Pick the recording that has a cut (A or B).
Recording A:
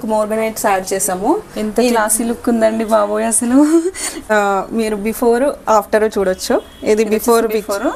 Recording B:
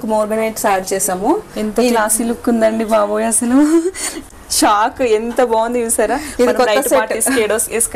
A